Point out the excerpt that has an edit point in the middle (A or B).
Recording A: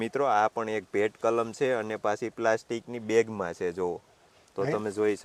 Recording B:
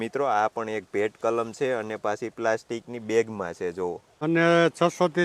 B